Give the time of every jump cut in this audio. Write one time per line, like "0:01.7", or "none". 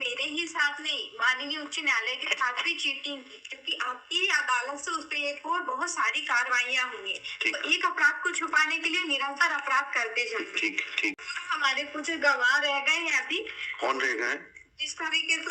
0:11.3